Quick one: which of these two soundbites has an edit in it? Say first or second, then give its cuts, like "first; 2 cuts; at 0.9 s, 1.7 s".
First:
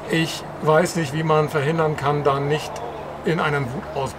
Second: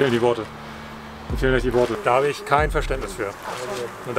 second; 1 cut; at 2.0 s